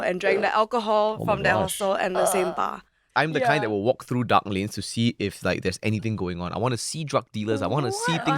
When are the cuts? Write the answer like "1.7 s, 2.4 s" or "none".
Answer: 3.1 s